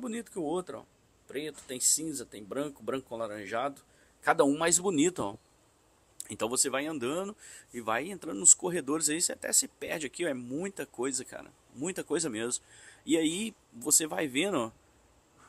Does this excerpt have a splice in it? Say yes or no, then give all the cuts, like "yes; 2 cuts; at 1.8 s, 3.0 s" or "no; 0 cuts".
no; 0 cuts